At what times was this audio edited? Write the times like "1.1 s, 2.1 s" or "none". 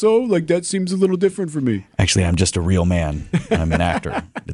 none